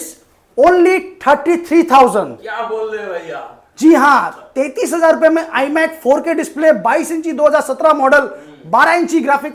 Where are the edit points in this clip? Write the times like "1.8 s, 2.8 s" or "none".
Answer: none